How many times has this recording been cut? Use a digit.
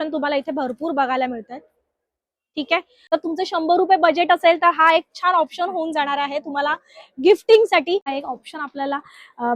2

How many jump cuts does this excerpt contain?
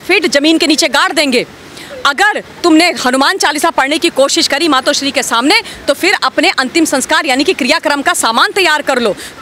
0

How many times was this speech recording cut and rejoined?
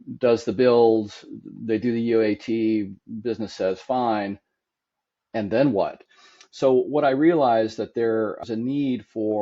2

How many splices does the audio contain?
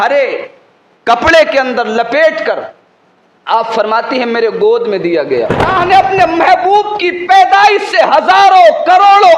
1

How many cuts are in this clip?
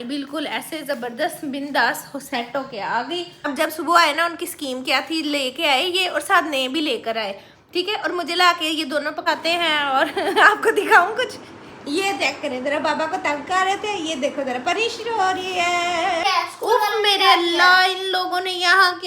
3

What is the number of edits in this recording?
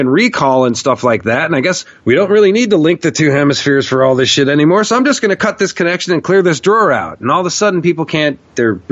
1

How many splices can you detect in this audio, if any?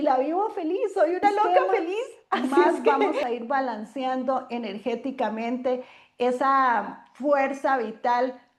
1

